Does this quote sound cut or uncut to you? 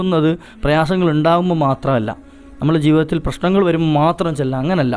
uncut